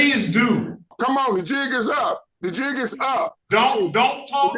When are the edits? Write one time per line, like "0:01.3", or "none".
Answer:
0:00.9
0:02.3
0:03.4

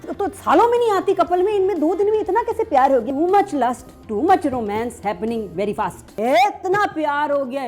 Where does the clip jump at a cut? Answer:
0:03.1
0:06.1

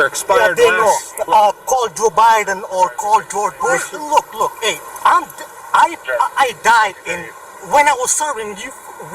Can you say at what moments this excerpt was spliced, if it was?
0:03.9

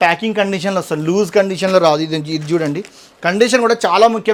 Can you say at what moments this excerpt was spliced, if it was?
none

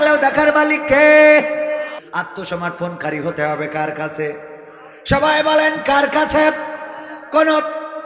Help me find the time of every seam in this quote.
0:01.9

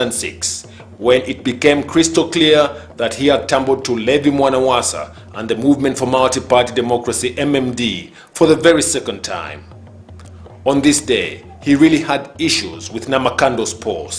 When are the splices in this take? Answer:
0:02.8

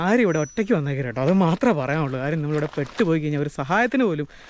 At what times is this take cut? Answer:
none

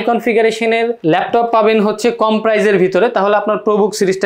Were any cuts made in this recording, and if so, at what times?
none

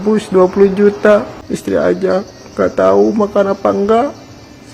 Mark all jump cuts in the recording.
0:01.4

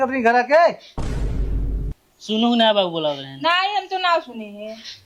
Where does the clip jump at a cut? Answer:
0:00.9
0:01.9

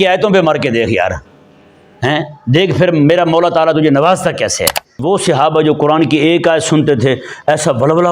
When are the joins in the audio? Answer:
0:05.0

